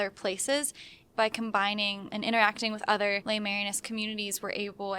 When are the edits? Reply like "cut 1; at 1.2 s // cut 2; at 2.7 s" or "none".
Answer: cut 1; at 1.0 s // cut 2; at 2.0 s // cut 3; at 3.2 s

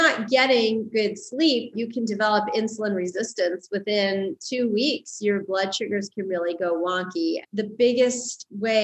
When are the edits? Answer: cut 1; at 1.7 s // cut 2; at 7.4 s

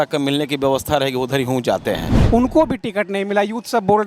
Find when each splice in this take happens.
cut 1; at 2.1 s

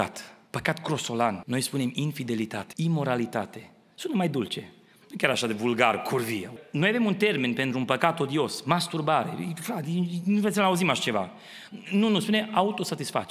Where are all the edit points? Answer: cut 1; at 1.4 s // cut 2; at 2.6 s // cut 3; at 6.6 s

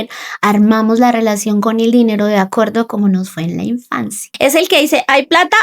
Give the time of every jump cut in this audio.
cut 1; at 4.2 s

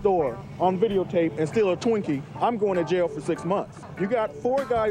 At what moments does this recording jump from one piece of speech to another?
cut 1; at 3.8 s

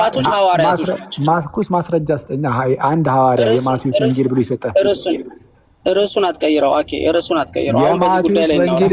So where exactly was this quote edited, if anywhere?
none

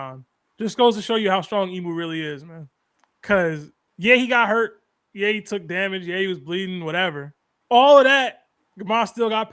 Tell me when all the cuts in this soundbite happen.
none

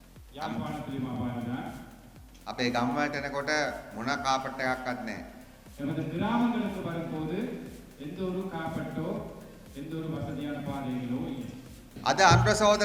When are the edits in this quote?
cut 1; at 11.9 s

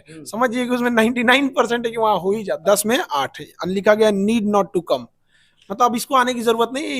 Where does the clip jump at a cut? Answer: cut 1; at 2.6 s

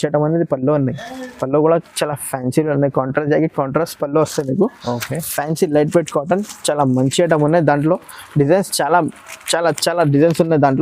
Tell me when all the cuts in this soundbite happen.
none

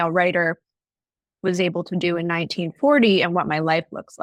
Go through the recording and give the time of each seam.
none

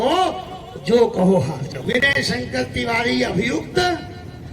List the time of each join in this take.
cut 1; at 2.1 s

